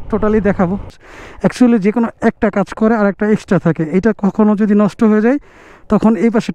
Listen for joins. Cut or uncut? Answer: cut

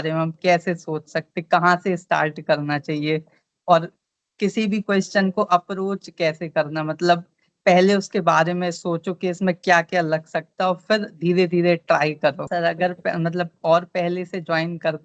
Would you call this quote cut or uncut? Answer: cut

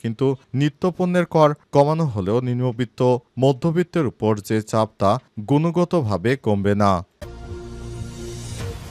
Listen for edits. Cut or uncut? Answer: cut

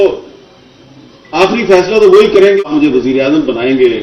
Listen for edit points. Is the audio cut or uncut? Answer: cut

